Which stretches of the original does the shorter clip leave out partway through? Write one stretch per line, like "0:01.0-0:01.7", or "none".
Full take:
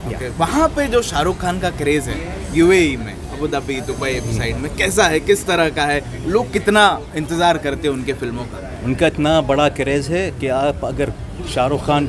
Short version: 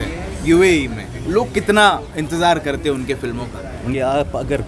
0:03.2-0:06.1
0:08.9-0:10.4